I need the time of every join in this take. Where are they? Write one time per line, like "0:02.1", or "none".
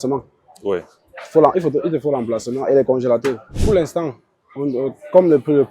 0:03.5